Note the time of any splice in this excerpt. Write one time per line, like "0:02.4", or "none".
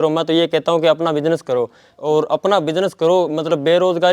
0:01.9